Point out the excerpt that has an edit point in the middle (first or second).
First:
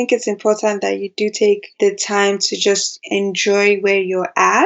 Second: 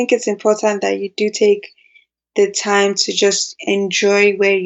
first